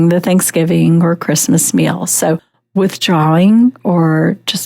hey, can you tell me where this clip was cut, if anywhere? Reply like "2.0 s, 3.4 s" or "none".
2.6 s